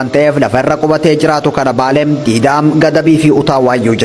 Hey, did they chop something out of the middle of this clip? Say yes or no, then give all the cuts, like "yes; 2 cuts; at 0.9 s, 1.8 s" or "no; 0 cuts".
no; 0 cuts